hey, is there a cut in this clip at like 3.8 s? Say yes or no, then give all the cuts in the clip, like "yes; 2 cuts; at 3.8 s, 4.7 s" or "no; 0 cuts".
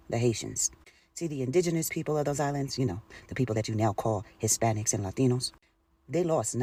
no; 0 cuts